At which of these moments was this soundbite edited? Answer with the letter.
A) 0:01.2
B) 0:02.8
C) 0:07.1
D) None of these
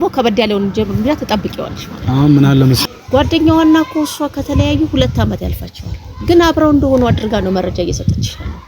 B